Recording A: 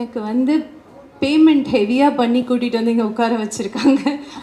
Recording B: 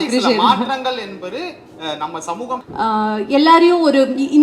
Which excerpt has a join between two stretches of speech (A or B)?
B